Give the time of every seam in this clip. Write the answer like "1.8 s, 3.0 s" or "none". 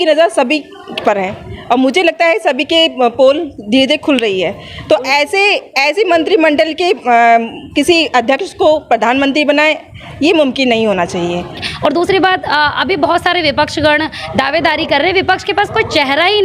11.6 s